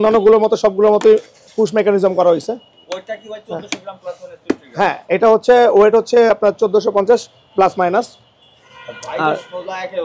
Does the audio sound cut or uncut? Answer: uncut